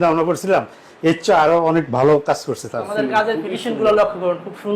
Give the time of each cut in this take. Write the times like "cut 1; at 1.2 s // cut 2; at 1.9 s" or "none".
cut 1; at 2.9 s